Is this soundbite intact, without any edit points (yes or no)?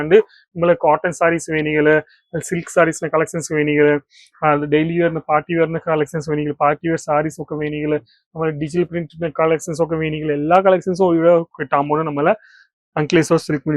yes